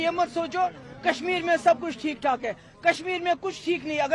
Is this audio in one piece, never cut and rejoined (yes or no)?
yes